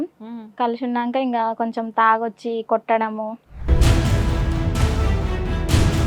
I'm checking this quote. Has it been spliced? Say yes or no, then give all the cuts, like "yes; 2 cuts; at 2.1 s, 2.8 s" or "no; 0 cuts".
no; 0 cuts